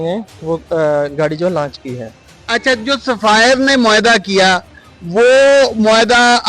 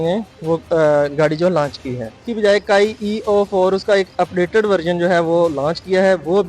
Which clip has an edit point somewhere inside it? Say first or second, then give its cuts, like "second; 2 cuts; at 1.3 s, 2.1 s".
second; 1 cut; at 2.2 s